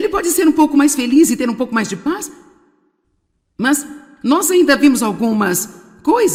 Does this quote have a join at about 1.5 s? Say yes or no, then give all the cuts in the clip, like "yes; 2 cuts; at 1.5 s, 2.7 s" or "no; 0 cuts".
no; 0 cuts